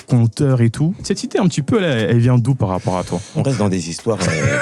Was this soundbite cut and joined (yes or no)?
yes